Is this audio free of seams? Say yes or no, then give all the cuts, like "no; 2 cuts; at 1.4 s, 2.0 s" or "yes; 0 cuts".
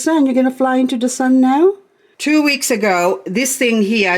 no; 1 cut; at 2.1 s